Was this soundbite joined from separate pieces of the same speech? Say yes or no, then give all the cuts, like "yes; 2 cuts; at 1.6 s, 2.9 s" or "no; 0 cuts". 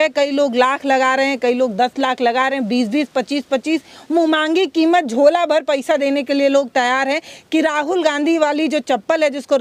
no; 0 cuts